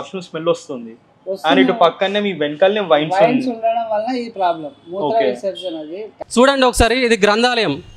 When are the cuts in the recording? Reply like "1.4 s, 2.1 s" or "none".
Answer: 6.1 s